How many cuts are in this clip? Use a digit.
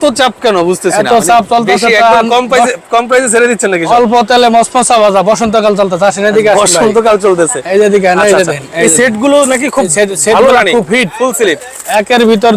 0